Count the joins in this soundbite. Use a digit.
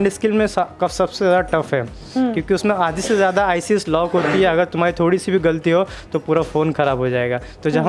0